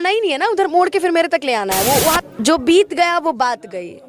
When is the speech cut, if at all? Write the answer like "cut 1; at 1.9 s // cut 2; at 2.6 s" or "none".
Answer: cut 1; at 2.2 s